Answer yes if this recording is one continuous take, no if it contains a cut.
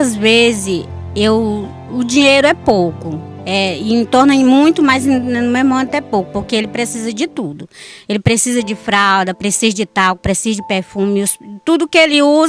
yes